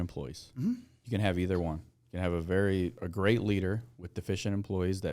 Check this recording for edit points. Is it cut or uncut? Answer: cut